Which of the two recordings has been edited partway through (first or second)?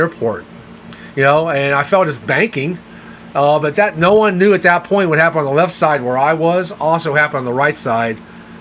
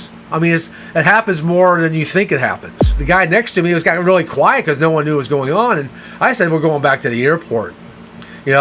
second